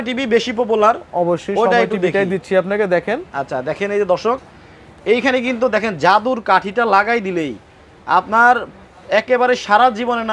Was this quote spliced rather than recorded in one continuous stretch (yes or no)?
no